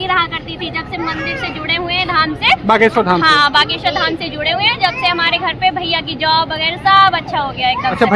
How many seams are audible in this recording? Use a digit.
0